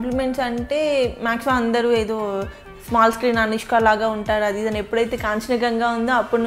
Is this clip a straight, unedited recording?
yes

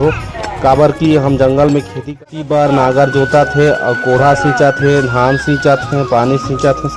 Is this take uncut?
no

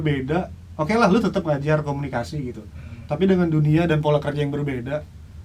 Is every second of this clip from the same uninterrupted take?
yes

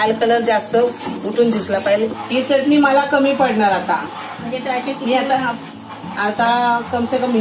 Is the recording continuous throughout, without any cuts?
no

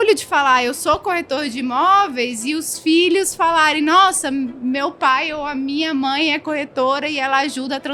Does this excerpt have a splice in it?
no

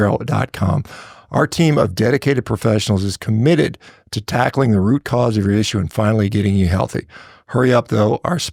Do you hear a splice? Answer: no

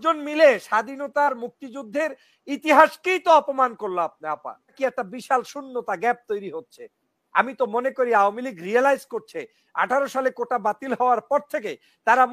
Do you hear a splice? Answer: yes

